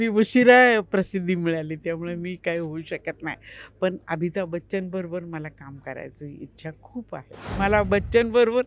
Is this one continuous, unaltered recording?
no; 1 cut; at 7.6 s

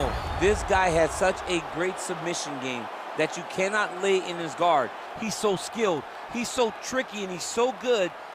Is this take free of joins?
yes; 0 cuts

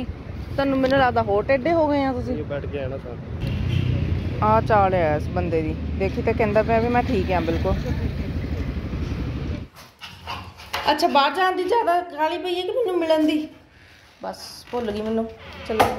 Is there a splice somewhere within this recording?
yes; 1 cut; at 9.6 s

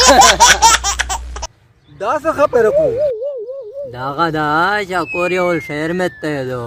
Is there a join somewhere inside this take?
no; 0 cuts

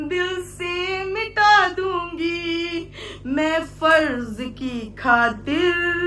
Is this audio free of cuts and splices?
yes; 0 cuts

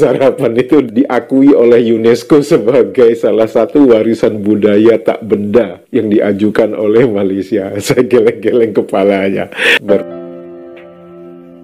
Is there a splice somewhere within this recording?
yes; 1 cut; at 10.0 s

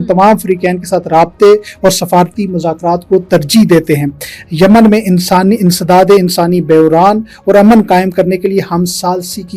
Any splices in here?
no; 0 cuts

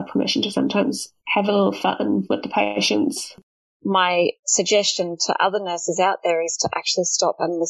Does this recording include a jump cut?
yes; 3 cuts; at 1.1 s, 3.3 s, 4.4 s

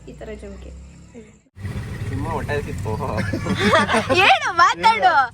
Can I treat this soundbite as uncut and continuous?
no; 1 cut; at 1.6 s

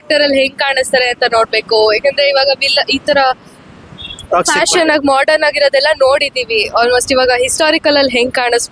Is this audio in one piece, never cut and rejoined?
yes; 0 cuts

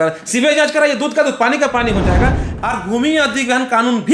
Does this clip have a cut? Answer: yes; 1 cut; at 2.6 s

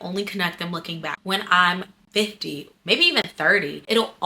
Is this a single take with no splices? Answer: no; 1 cut; at 1.1 s

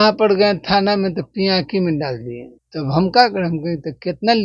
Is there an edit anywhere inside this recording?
no; 0 cuts

